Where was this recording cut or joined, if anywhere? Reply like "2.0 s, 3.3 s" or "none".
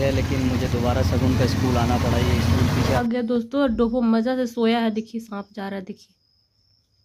3.0 s